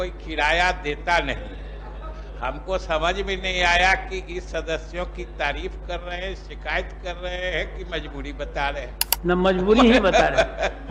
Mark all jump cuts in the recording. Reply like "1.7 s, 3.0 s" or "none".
none